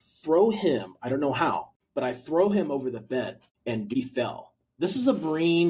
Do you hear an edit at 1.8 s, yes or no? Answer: yes